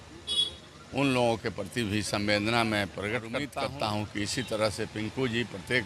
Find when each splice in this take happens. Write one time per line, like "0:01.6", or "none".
0:03.4